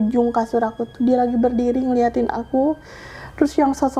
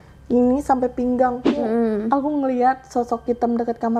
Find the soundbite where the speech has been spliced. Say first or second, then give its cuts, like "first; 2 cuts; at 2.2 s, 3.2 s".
second; 1 cut; at 1.6 s